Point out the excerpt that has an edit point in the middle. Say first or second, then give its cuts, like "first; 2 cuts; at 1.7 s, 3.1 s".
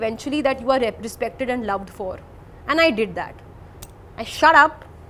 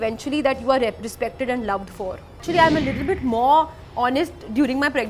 second; 1 cut; at 2.4 s